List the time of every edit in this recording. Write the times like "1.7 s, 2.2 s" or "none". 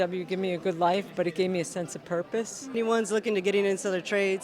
2.7 s